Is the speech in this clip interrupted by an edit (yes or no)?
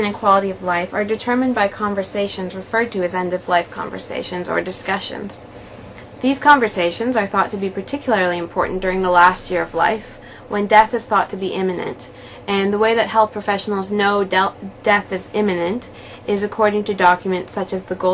no